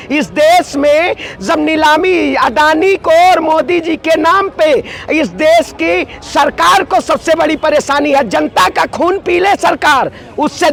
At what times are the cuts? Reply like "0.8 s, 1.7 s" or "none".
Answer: none